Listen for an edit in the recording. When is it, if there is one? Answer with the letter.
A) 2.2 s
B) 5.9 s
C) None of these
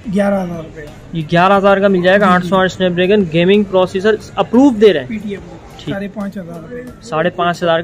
B